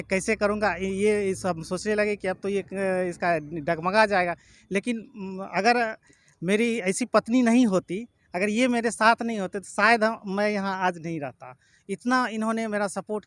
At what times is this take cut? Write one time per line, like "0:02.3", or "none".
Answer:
none